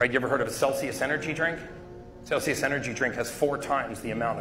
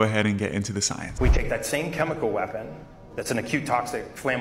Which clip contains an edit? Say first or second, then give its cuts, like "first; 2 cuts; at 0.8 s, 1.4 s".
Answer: second; 1 cut; at 1.1 s